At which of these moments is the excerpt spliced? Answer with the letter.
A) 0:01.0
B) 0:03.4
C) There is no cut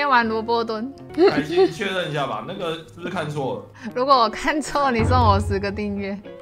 A